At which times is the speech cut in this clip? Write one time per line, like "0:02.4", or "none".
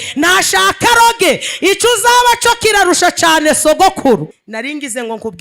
0:04.4